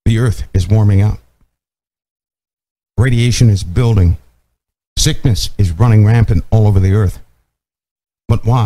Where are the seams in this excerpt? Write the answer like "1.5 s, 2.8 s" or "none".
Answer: none